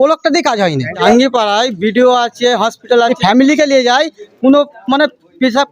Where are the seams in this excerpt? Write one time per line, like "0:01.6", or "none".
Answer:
0:01.1
0:03.1